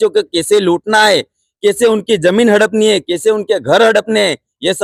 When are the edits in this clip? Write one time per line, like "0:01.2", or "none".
none